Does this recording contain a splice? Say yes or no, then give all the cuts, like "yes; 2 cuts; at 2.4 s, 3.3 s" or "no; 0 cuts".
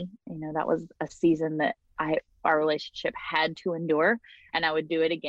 no; 0 cuts